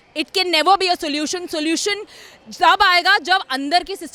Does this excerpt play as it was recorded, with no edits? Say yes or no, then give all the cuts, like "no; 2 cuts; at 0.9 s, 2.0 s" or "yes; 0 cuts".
yes; 0 cuts